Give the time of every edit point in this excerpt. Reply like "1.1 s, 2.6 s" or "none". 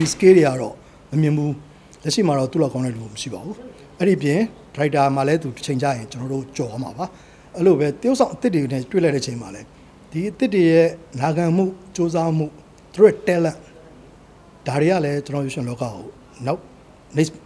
none